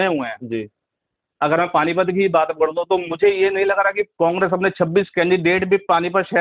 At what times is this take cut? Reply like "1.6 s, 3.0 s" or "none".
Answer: none